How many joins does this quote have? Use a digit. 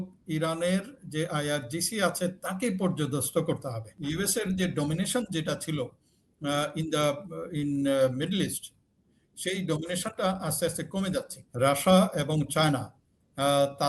2